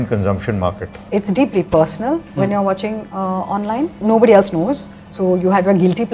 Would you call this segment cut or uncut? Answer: cut